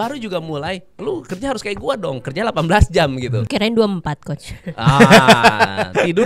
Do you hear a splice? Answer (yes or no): yes